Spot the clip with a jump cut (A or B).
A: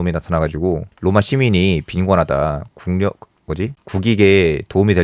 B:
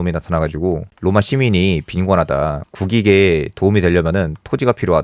B